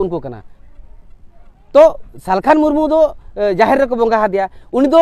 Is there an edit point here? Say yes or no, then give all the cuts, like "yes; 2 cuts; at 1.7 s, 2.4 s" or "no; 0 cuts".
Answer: no; 0 cuts